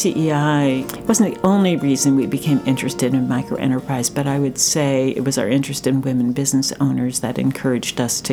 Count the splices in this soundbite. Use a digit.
1